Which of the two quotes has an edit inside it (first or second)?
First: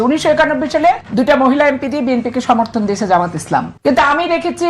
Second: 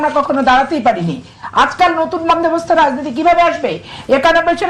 first